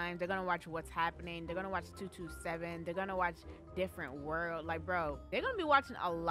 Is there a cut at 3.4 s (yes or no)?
no